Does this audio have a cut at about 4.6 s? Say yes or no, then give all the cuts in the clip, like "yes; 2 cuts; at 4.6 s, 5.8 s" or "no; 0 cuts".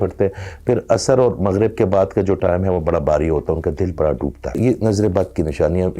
yes; 1 cut; at 4.6 s